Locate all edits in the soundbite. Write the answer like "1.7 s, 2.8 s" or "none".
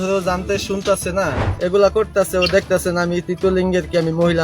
1.5 s